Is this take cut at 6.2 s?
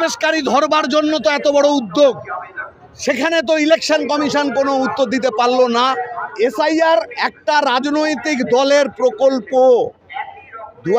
yes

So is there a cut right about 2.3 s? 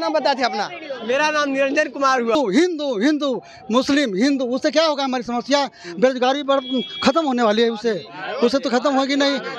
yes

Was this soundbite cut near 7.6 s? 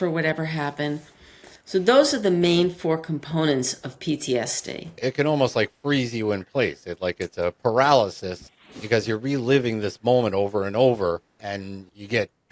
no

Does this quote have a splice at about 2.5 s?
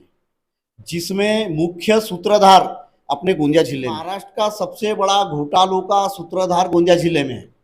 no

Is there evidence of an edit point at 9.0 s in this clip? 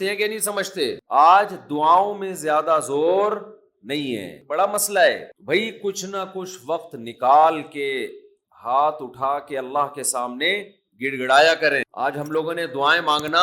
no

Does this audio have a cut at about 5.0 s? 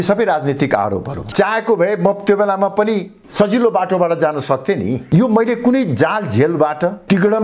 yes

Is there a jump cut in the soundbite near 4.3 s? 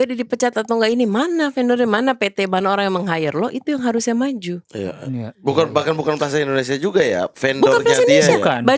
no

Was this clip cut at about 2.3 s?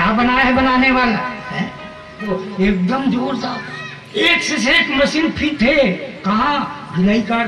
yes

